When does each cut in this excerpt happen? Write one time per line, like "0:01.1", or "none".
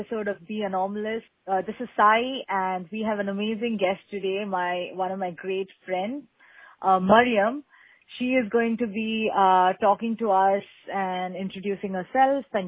0:01.3